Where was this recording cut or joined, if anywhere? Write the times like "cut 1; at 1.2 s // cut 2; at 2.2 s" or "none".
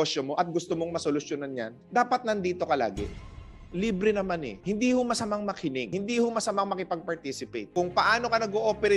cut 1; at 3.3 s // cut 2; at 4.6 s // cut 3; at 5.9 s // cut 4; at 7.6 s